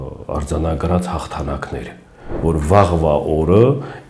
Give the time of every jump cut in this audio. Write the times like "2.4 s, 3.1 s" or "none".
2.2 s